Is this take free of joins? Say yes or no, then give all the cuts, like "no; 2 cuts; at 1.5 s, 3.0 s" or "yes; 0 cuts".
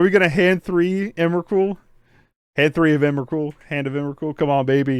yes; 0 cuts